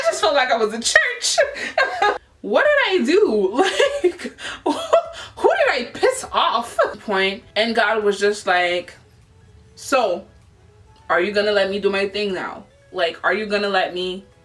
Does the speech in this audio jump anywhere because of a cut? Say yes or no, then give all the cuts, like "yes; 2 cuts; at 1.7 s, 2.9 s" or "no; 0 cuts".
yes; 2 cuts; at 2.2 s, 7.0 s